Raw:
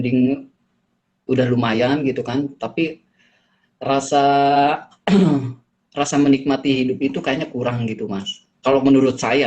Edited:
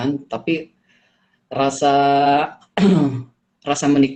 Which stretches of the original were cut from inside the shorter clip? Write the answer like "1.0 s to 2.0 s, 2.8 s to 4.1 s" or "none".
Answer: none